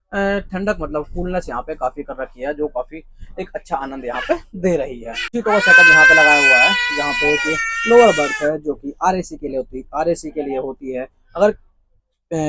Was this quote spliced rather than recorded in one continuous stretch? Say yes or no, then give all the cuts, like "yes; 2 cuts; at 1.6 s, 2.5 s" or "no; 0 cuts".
no; 0 cuts